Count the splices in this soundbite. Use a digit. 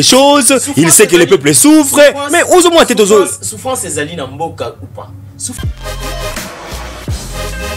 1